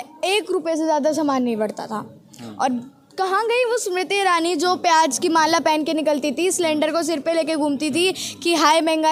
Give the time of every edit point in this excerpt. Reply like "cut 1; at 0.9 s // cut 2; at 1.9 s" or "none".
none